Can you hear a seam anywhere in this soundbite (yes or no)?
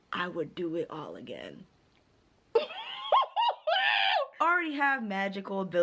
yes